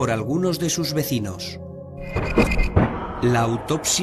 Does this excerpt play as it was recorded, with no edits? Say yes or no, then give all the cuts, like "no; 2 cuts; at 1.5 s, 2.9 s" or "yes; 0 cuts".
no; 1 cut; at 2.0 s